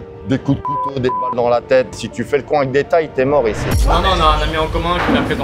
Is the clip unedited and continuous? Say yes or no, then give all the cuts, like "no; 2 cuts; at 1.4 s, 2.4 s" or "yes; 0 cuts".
no; 2 cuts; at 2.0 s, 3.8 s